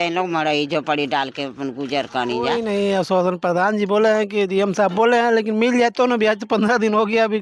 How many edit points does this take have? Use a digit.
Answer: 1